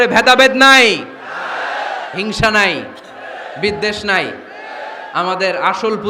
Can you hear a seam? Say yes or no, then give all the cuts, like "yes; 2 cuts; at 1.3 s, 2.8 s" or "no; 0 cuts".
no; 0 cuts